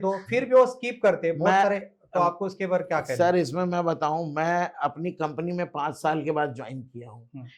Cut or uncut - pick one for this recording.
uncut